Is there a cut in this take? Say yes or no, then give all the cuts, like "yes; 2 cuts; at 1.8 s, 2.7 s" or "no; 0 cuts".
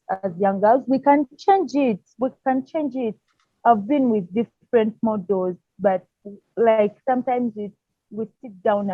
no; 0 cuts